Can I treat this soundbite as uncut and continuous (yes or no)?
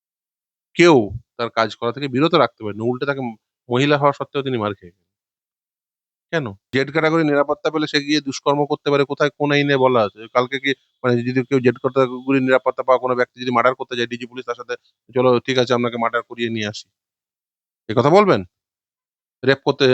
no